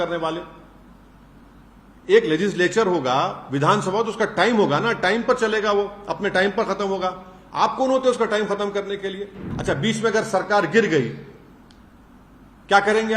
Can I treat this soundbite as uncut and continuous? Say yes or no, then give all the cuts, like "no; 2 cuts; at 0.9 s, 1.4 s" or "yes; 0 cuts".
no; 1 cut; at 9.5 s